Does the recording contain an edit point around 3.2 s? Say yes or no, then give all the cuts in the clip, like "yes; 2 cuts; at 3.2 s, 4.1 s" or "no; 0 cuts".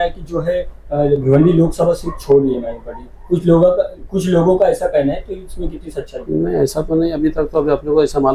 no; 0 cuts